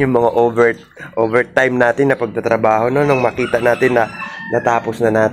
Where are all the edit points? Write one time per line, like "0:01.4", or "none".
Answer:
none